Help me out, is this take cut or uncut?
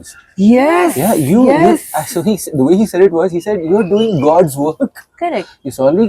uncut